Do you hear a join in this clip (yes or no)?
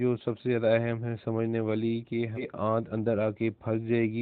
yes